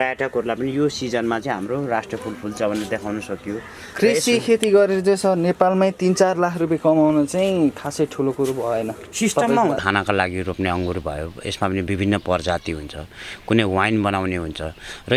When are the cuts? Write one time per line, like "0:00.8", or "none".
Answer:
0:09.8